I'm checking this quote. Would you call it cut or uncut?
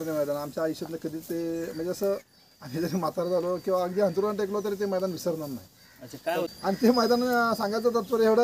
cut